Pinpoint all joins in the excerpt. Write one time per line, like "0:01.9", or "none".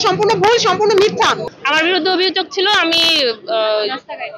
0:01.5

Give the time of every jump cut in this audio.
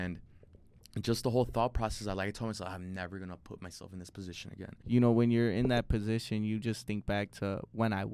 0:04.8

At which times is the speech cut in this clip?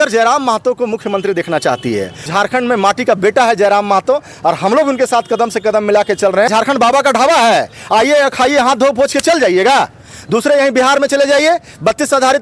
0:02.3
0:06.5

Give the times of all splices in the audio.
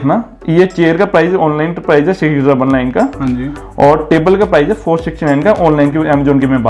none

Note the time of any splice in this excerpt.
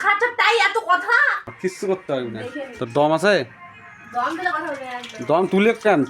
0:01.3

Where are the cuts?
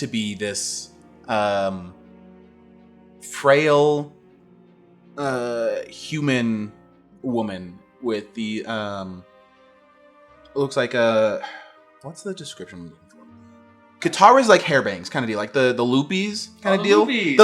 none

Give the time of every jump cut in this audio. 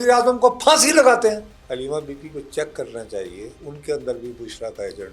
0:01.5
0:03.6

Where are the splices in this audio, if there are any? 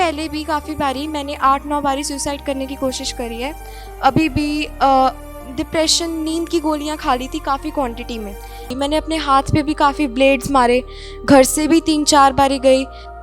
0:08.7

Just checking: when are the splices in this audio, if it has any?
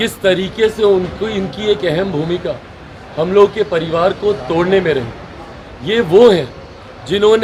none

